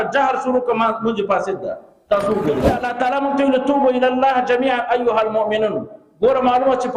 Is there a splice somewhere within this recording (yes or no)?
yes